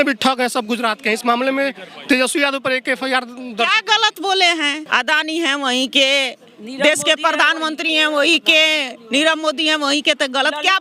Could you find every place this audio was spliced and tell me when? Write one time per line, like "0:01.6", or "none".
0:04.8